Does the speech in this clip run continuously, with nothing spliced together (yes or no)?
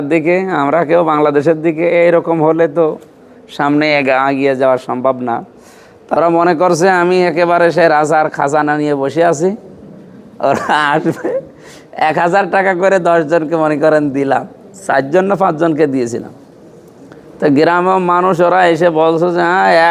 no